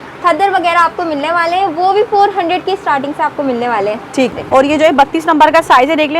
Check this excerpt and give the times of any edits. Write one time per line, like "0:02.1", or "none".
0:04.3